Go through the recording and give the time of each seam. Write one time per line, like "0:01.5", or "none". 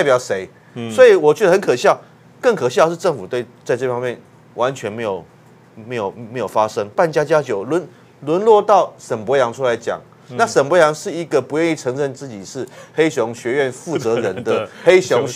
0:06.9